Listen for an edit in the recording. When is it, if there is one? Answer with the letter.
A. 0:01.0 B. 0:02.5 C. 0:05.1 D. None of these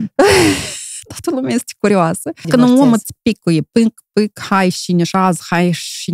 B